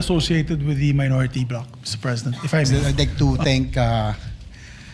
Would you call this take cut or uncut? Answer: cut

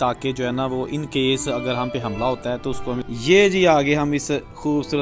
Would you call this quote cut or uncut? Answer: cut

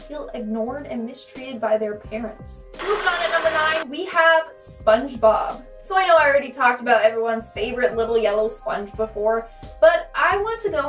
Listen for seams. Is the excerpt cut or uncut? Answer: cut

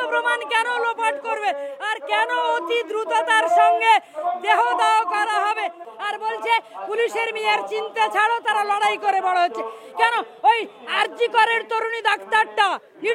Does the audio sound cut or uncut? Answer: cut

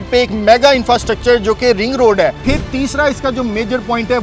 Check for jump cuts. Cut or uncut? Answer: cut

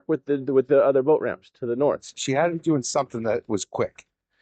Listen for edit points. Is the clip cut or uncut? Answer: cut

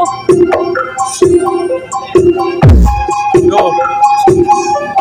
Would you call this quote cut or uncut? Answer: uncut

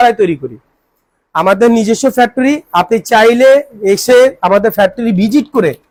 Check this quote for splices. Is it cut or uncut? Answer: uncut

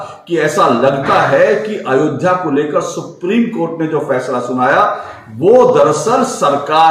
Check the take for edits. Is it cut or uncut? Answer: uncut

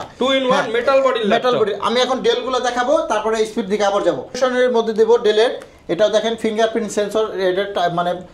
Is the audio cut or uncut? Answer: cut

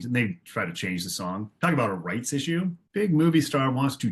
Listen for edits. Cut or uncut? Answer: cut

